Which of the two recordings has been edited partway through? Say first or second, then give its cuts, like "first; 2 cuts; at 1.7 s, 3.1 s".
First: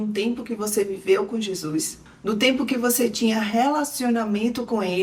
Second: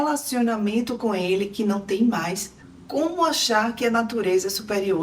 second; 1 cut; at 2.6 s